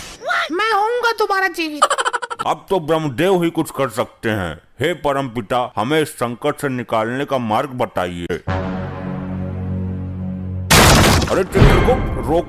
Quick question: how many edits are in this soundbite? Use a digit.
2